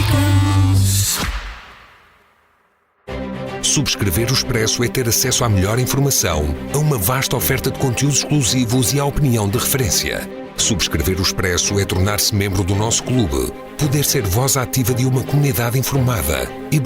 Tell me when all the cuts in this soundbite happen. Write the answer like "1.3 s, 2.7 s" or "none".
1.1 s

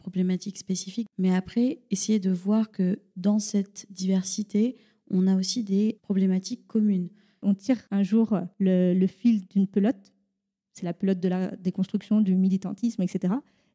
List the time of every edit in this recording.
1.1 s, 7.4 s

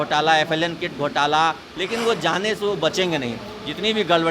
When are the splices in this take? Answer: 1.7 s

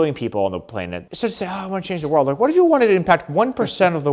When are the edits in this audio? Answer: 1.0 s

